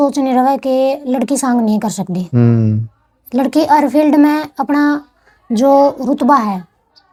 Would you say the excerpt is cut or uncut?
uncut